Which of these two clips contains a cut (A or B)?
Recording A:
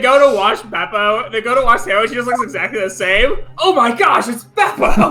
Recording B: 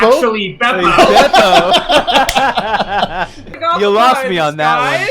B